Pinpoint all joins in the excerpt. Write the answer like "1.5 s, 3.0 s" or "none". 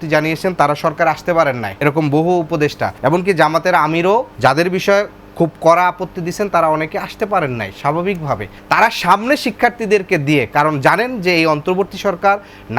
1.7 s, 2.9 s, 4.3 s, 8.5 s